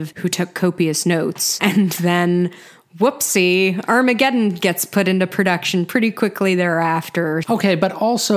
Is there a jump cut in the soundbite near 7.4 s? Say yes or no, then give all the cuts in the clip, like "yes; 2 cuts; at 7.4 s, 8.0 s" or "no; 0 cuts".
yes; 1 cut; at 7.4 s